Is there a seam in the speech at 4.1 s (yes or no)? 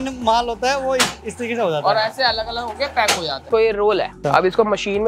yes